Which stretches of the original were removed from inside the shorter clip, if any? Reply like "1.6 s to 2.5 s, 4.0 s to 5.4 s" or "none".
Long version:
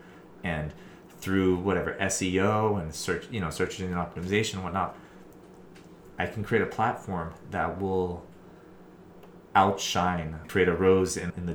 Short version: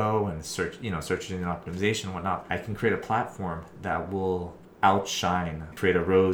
4.9 s to 6.1 s, 8.3 s to 9.3 s

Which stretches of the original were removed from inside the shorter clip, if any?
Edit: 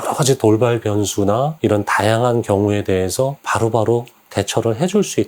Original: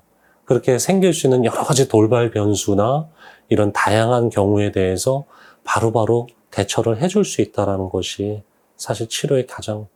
3.0 s to 3.4 s, 5.3 s to 5.6 s

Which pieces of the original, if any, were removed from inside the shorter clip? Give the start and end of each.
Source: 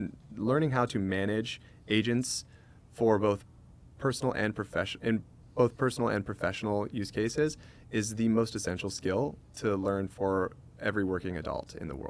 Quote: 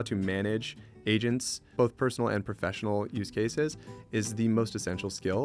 2.4 s to 5.4 s

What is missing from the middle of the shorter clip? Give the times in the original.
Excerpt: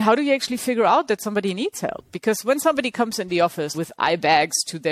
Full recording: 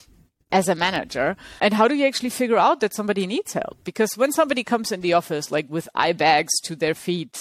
5.4 s to 5.7 s

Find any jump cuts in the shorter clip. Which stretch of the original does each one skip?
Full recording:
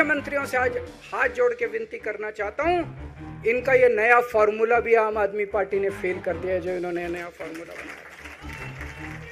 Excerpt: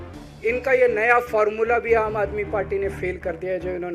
none

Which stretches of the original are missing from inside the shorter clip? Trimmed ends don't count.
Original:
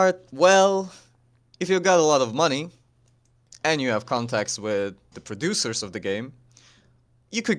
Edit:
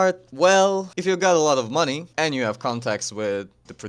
0.9 s to 1.5 s, 2.7 s to 3.5 s

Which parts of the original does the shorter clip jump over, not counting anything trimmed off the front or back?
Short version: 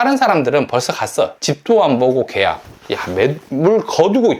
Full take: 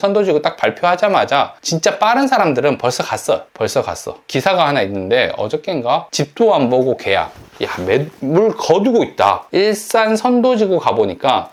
3.5 s to 6.1 s

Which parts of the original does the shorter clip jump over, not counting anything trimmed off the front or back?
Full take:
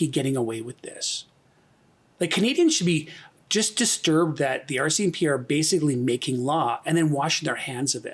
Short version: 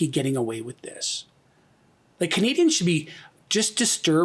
none

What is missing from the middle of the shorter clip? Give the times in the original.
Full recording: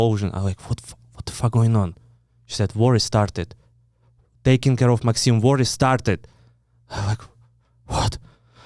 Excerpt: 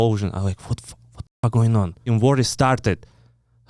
2.0 s to 5.2 s

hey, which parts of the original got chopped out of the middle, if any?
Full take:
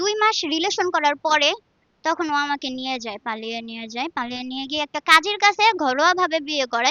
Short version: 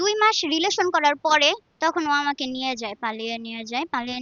1.7 s to 1.9 s

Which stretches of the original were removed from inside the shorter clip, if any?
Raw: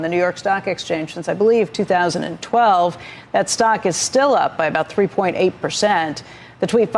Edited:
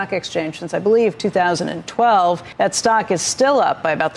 3.0 s to 3.2 s

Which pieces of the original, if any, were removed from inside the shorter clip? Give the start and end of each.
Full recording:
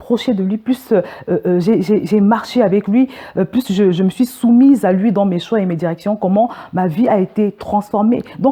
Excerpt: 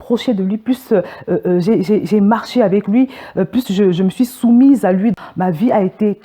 5.1 s to 6.5 s

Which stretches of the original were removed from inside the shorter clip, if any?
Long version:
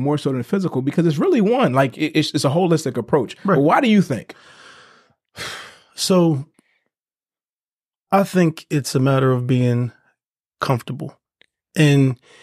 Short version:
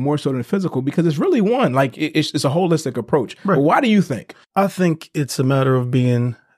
4.4 s to 7.9 s

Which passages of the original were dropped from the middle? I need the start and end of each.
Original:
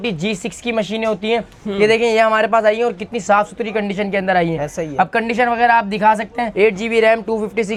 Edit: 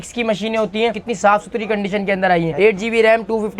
1.5 s to 3.1 s, 4.6 s to 6.5 s

